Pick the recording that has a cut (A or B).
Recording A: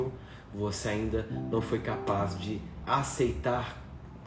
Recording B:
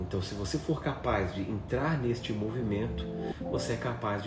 A